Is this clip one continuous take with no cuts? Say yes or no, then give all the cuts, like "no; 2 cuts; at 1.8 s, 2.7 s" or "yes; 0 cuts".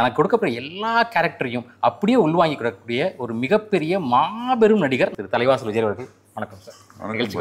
no; 1 cut; at 5.1 s